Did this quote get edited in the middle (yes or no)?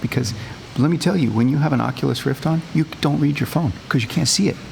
yes